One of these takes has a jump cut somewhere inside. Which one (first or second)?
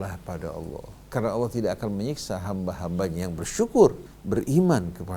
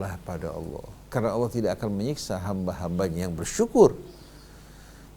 first